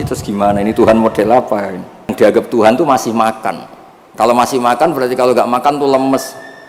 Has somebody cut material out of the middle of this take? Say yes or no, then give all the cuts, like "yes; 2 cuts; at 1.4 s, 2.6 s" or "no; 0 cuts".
yes; 1 cut; at 2.1 s